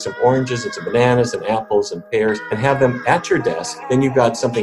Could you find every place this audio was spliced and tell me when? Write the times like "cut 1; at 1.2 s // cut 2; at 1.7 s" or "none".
cut 1; at 2.5 s // cut 2; at 3.7 s

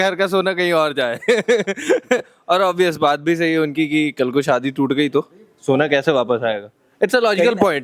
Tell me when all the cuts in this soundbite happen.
none

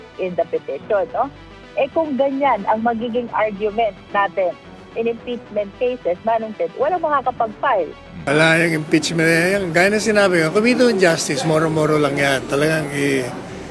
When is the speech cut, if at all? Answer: cut 1; at 8.1 s

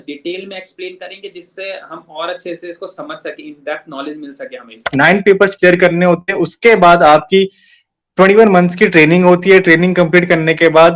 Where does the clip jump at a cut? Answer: cut 1; at 4.9 s

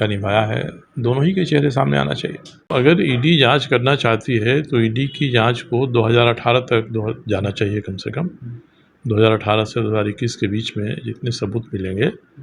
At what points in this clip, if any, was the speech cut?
cut 1; at 2.7 s

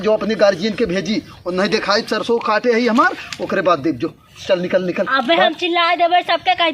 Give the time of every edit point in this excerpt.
none

